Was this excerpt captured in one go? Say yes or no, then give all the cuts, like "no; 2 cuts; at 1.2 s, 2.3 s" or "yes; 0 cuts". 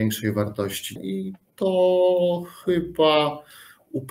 no; 1 cut; at 1.0 s